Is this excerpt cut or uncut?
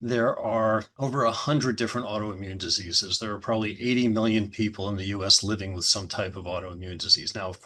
cut